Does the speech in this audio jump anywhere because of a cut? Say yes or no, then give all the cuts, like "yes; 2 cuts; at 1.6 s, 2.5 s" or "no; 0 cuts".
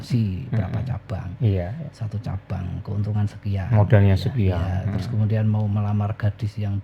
no; 0 cuts